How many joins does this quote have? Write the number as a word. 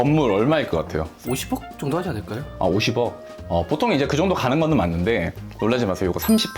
one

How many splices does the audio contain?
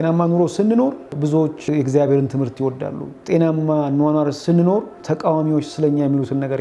three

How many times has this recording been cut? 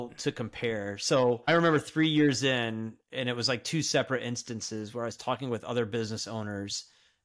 one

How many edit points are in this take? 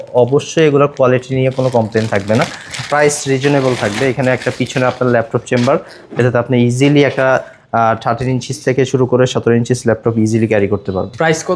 zero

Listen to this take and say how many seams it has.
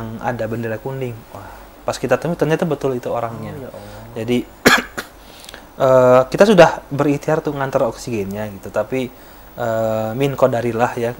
zero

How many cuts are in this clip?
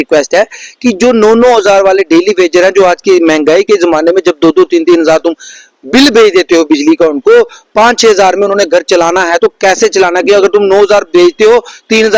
zero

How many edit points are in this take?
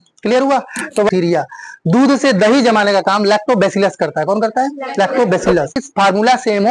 two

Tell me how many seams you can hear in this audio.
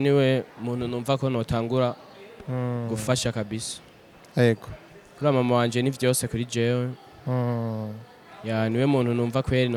zero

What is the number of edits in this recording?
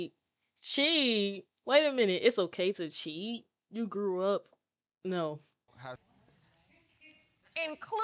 one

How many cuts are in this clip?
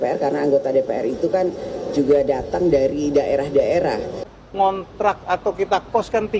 one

